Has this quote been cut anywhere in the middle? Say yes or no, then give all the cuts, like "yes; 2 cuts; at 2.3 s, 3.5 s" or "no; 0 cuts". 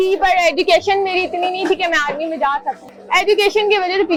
no; 0 cuts